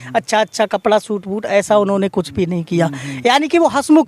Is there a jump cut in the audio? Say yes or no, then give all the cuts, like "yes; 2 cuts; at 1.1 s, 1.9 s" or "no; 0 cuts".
no; 0 cuts